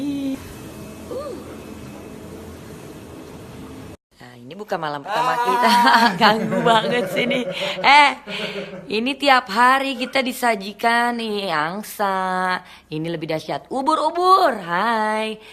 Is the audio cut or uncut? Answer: uncut